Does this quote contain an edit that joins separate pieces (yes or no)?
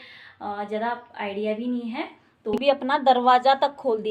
yes